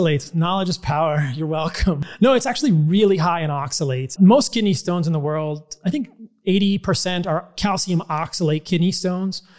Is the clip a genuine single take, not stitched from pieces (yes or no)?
no